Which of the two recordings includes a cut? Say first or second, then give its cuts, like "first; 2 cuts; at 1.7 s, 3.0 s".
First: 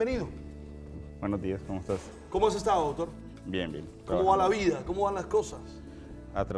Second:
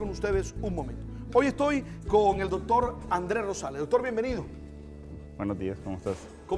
first; 1 cut; at 4.0 s